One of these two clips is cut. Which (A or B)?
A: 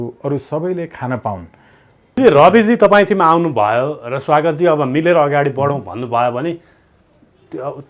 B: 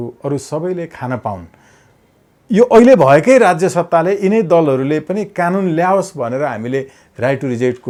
A